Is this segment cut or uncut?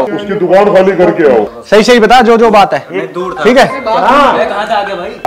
cut